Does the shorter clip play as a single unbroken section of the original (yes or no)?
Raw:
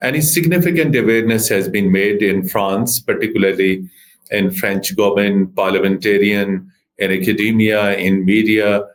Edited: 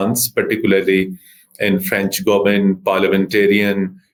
yes